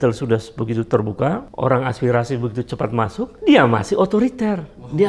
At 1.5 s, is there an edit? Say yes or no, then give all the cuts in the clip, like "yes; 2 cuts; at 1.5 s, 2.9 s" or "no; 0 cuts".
yes; 2 cuts; at 1.5 s, 3.4 s